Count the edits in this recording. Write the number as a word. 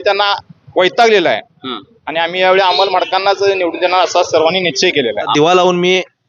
one